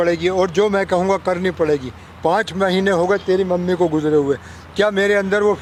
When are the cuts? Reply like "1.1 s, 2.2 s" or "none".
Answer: none